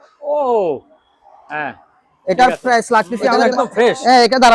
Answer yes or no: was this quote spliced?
yes